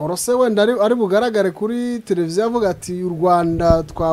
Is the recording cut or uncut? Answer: uncut